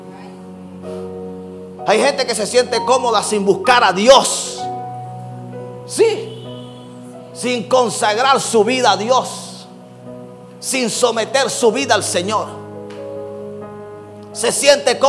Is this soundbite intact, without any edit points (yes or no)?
yes